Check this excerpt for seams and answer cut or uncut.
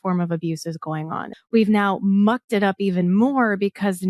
cut